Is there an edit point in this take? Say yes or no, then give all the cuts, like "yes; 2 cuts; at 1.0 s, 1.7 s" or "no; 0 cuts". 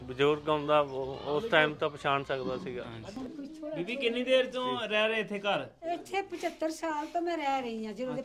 yes; 1 cut; at 3.2 s